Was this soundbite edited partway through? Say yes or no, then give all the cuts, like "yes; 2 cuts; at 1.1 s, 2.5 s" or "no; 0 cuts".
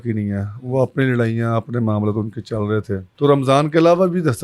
yes; 1 cut; at 3.0 s